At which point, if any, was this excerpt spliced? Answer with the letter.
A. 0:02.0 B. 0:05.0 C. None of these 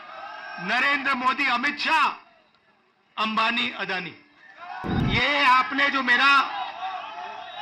B